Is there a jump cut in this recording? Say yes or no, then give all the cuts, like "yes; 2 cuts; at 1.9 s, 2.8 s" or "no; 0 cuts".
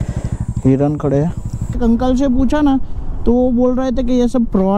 yes; 1 cut; at 1.8 s